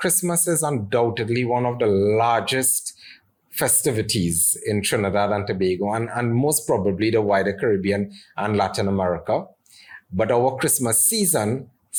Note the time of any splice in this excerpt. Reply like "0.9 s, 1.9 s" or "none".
none